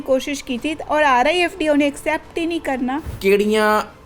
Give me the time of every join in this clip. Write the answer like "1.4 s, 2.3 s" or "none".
3.1 s